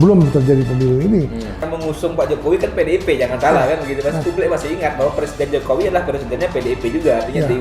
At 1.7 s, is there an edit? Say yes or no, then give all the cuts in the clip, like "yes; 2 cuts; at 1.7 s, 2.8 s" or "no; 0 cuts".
yes; 1 cut; at 1.7 s